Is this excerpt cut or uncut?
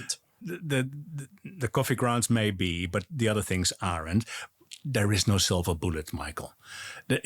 cut